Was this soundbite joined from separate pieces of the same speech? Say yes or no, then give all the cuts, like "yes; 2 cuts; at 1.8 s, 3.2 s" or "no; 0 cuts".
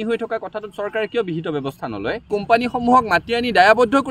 yes; 1 cut; at 2.3 s